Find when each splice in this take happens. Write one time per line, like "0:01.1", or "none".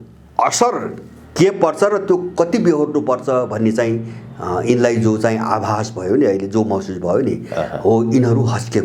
none